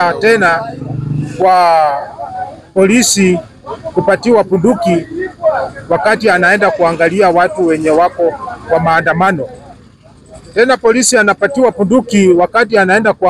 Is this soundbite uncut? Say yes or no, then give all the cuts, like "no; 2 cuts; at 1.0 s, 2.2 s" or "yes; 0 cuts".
yes; 0 cuts